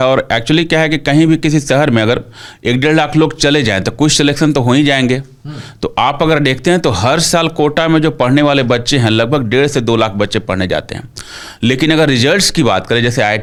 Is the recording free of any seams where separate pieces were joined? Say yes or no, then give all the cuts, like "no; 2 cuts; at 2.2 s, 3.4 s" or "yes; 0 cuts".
yes; 0 cuts